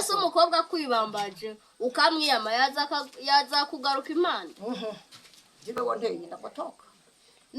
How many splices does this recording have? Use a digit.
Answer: 1